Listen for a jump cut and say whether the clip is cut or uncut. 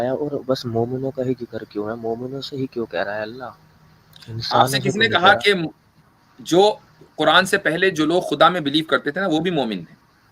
uncut